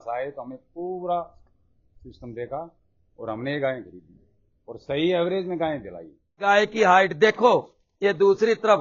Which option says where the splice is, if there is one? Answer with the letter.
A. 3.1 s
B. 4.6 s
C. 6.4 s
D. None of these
C